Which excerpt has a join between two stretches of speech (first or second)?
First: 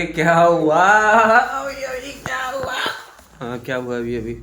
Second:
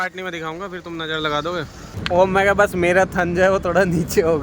second